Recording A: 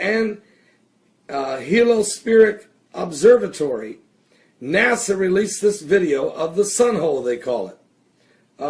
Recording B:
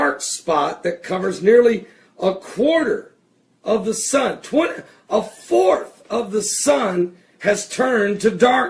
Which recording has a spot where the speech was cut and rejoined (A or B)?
A